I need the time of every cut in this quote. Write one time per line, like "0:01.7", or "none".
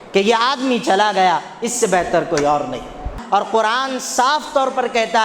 0:03.2